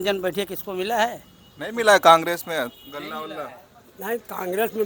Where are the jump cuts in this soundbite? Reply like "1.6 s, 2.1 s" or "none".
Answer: none